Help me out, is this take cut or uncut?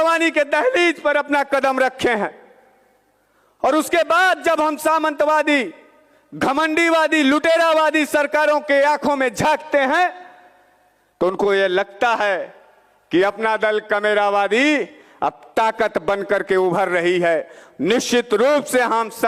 uncut